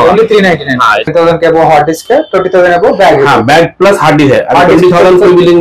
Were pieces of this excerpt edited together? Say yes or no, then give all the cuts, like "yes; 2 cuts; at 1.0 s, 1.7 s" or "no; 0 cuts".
yes; 1 cut; at 1.1 s